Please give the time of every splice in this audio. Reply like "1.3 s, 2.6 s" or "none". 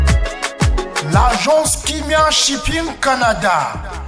1.0 s